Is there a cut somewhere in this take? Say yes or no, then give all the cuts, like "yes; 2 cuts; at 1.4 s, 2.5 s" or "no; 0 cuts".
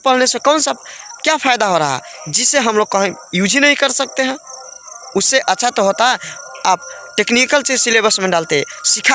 no; 0 cuts